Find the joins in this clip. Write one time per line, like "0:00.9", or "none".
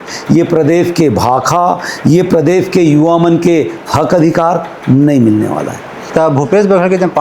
0:06.0